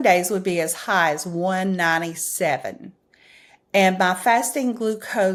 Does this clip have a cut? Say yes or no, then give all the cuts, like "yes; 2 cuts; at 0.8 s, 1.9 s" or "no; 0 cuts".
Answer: no; 0 cuts